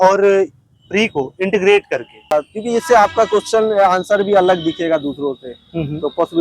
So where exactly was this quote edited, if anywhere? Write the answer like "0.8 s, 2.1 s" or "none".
2.3 s